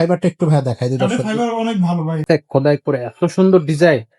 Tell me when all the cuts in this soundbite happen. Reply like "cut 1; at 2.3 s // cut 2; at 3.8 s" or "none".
cut 1; at 2.2 s